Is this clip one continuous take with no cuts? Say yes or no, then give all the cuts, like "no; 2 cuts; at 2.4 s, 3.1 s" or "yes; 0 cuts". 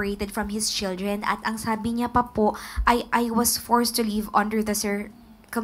yes; 0 cuts